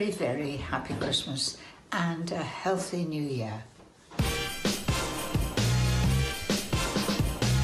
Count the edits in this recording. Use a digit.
0